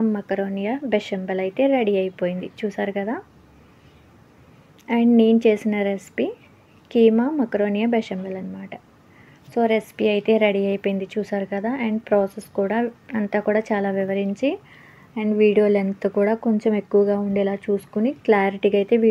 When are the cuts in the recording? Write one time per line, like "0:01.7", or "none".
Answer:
none